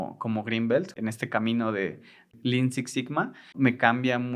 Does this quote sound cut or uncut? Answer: cut